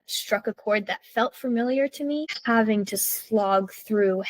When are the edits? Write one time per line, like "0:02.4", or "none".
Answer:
0:02.3